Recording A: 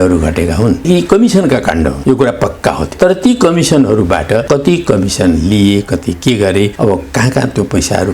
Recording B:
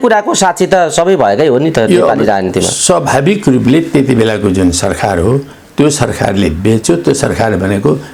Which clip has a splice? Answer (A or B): A